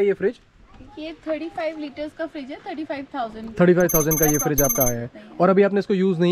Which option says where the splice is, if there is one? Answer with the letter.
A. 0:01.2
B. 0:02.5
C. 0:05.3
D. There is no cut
D